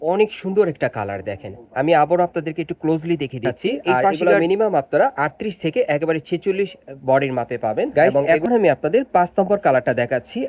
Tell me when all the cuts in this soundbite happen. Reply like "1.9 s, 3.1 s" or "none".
4.2 s, 7.9 s